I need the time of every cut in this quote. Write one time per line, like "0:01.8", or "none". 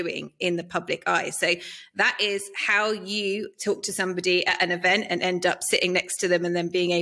none